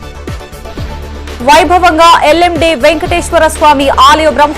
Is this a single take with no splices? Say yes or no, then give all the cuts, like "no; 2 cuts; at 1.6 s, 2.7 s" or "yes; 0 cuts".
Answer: no; 1 cut; at 1.1 s